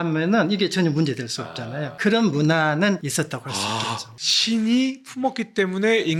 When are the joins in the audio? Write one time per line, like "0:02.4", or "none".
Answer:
none